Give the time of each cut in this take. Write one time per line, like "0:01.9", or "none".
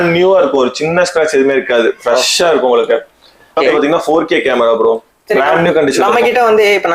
0:03.7